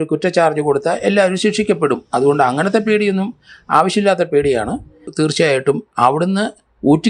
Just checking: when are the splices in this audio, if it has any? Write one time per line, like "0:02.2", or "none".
0:05.1

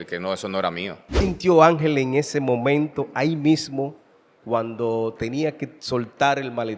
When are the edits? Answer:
0:01.2

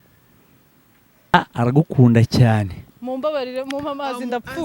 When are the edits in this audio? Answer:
0:01.3

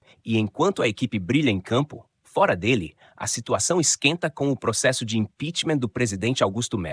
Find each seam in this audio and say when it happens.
none

